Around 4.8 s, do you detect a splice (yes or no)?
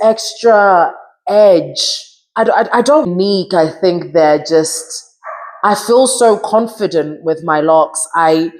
no